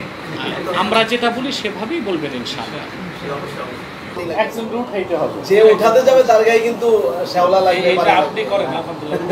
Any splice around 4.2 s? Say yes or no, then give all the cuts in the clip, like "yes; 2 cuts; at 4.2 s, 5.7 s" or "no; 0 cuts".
yes; 1 cut; at 4.2 s